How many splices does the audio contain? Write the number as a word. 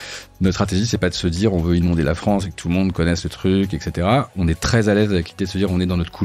one